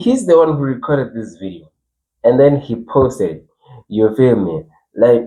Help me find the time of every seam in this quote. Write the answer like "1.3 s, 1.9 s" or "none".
none